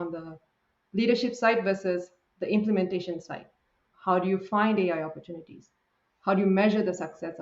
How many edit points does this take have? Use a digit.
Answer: 1